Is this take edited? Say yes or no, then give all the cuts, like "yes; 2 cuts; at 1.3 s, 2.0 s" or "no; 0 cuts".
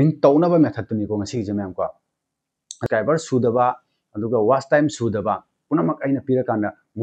yes; 1 cut; at 2.7 s